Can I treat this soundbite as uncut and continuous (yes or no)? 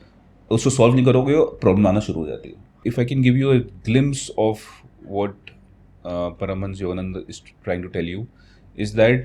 no